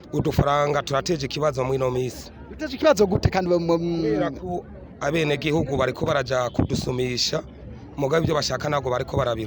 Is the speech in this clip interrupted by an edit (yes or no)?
no